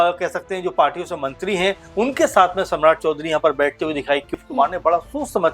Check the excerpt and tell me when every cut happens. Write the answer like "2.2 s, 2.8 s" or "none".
4.3 s

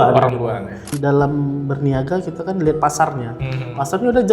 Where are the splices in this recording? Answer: 0.9 s

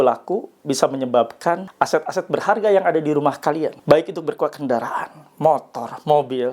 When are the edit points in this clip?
1.7 s, 3.8 s

